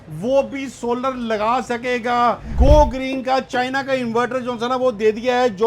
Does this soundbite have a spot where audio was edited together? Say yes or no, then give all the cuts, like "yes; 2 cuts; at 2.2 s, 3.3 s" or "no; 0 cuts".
yes; 1 cut; at 2.5 s